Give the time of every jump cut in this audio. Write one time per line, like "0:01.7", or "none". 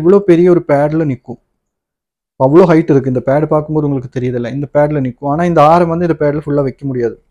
none